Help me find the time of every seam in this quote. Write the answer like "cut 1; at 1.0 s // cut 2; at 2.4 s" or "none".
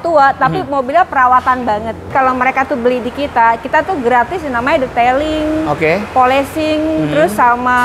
cut 1; at 2.1 s